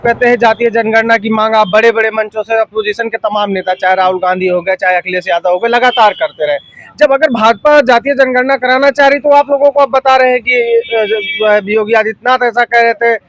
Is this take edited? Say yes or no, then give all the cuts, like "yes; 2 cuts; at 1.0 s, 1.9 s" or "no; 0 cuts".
no; 0 cuts